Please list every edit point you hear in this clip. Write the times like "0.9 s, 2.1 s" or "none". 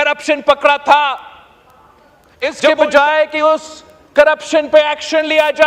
2.7 s